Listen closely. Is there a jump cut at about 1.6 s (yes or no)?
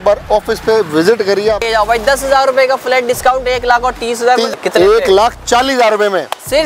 yes